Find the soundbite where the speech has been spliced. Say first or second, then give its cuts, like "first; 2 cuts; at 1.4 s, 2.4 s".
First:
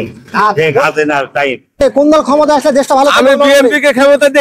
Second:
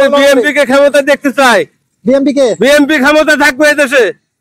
first; 1 cut; at 1.7 s